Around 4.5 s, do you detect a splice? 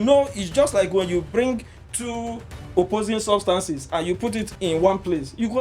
yes; 1 cut; at 4.5 s

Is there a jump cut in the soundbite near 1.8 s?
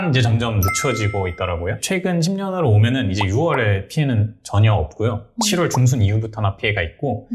yes; 1 cut; at 1.8 s

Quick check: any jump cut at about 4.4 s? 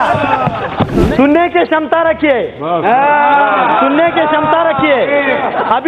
no; 1 cut; at 1.0 s

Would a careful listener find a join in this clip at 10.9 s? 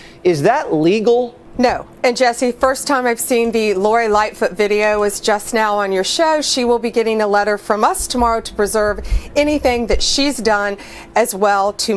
no; 1 cut; at 1.4 s

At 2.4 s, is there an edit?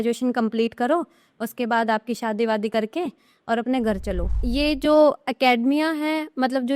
no; 1 cut; at 4.3 s

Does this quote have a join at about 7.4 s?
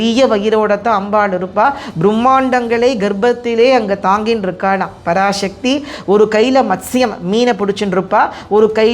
no; 1 cut; at 6.0 s

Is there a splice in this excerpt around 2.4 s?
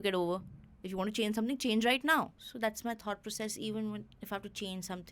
yes; 1 cut; at 2.4 s

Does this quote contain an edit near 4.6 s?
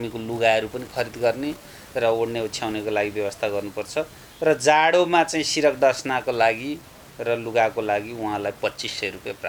no; 0 cuts

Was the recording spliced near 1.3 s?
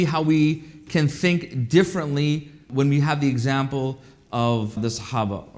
no; 2 cuts; at 2.7 s, 4.8 s

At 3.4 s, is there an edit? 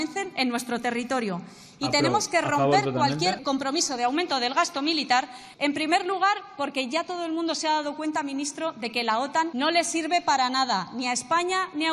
yes; 3 cuts; at 3.4 s, 5.4 s, 9.5 s

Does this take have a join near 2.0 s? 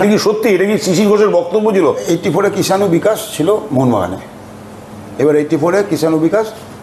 yes; 1 cut; at 2.0 s

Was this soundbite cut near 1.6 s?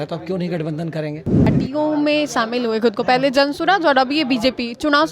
yes; 1 cut; at 1.6 s

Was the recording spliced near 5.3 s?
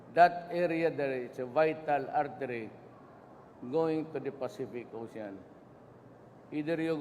yes; 1 cut; at 5.3 s

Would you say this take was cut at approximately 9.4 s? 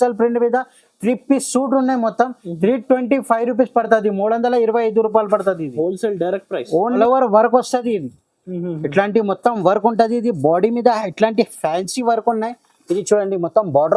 no; 1 cut; at 7.0 s

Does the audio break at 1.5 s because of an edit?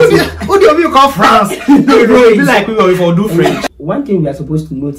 no; 1 cut; at 3.4 s

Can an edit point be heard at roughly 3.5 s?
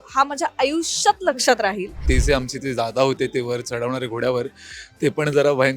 no; 1 cut; at 2.0 s

